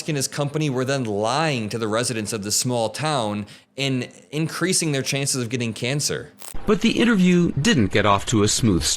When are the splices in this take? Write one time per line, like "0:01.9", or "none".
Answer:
0:06.4